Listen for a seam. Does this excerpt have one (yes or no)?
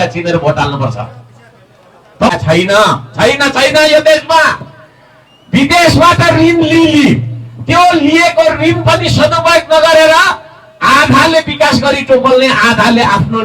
yes